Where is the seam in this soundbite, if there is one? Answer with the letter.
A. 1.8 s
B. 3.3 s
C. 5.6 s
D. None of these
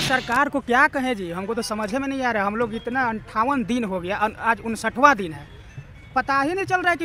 D